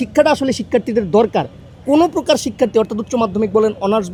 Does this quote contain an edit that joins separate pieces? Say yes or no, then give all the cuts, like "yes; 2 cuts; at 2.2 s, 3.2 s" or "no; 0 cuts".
no; 0 cuts